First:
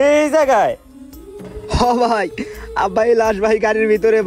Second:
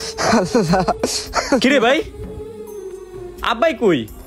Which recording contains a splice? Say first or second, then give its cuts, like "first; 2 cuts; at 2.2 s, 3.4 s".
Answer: second; 1 cut; at 1.0 s